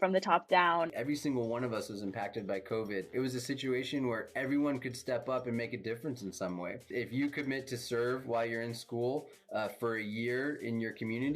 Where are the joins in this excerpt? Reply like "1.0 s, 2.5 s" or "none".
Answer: 0.9 s, 3.1 s, 6.9 s